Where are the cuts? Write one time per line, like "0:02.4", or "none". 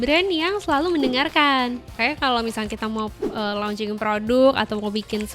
0:02.0